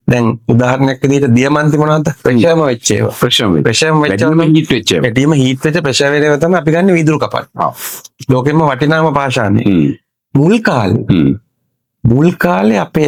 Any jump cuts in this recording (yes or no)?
no